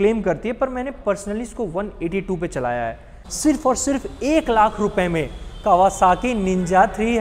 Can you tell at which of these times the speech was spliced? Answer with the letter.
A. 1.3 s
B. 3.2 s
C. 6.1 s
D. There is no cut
B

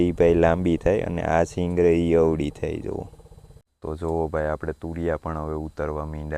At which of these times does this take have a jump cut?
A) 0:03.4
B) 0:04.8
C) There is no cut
A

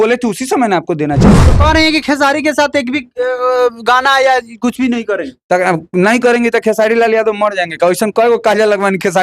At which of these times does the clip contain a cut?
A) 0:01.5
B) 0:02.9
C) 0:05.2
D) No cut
A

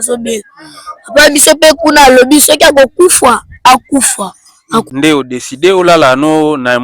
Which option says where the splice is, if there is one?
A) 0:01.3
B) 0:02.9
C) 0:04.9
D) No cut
C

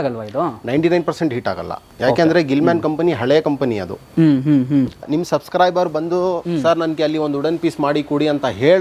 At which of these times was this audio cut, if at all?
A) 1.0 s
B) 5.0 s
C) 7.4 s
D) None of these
B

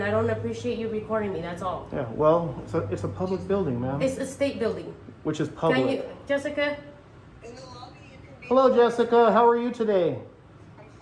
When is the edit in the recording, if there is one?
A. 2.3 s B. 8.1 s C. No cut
C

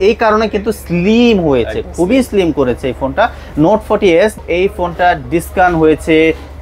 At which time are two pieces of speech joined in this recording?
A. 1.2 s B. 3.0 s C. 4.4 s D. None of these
C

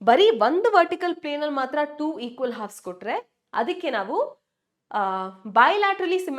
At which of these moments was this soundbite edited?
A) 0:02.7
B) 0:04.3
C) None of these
C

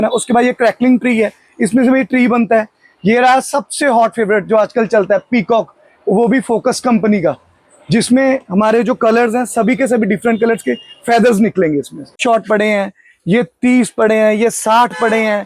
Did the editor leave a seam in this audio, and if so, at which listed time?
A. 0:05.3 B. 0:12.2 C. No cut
B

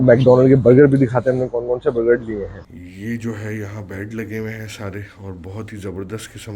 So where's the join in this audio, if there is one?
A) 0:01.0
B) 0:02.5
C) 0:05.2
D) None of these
B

